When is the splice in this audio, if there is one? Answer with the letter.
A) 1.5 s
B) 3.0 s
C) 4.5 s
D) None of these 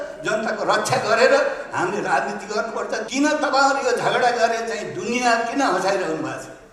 B